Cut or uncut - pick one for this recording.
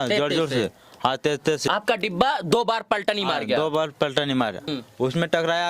cut